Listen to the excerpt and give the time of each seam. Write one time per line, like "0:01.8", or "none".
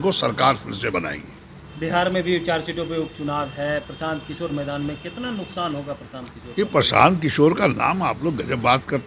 none